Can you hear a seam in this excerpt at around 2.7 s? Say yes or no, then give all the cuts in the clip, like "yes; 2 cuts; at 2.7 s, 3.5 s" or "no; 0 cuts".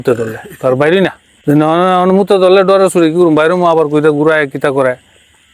no; 1 cut; at 1.3 s